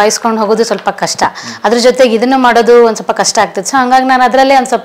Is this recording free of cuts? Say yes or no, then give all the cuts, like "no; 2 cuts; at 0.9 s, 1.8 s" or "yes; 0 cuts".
yes; 0 cuts